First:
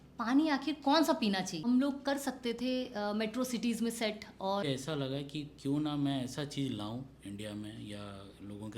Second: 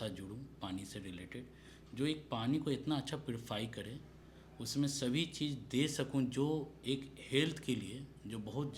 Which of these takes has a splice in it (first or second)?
first